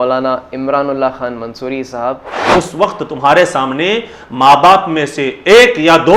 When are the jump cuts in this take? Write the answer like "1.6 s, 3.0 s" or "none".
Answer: 2.3 s